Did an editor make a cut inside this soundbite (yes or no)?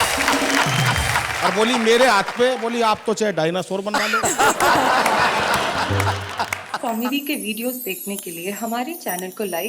yes